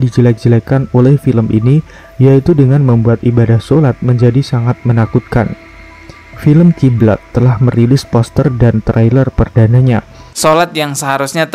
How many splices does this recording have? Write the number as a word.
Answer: one